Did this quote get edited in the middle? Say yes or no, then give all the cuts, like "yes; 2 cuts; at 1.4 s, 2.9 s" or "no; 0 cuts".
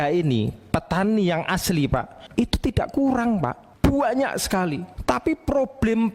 yes; 3 cuts; at 2.2 s, 3.6 s, 4.9 s